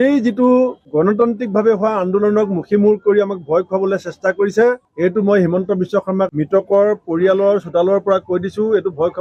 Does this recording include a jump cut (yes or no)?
no